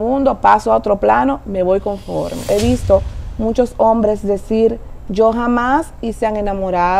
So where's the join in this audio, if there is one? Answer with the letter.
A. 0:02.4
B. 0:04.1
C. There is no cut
A